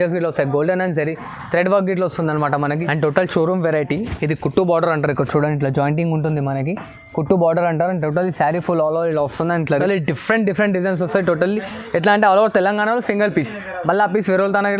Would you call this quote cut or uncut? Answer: cut